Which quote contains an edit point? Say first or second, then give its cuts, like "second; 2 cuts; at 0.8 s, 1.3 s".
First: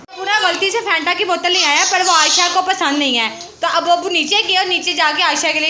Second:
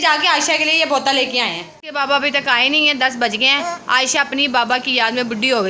second; 1 cut; at 1.8 s